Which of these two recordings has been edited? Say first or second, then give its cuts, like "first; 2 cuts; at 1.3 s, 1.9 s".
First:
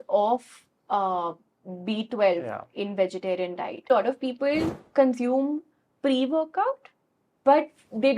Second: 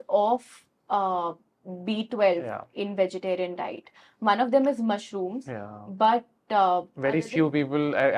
first; 1 cut; at 3.9 s